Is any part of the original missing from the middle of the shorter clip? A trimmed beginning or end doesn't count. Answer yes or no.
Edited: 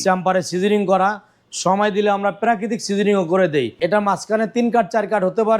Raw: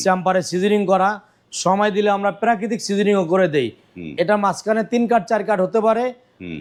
yes